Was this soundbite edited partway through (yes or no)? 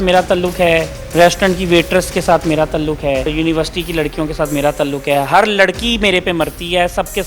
yes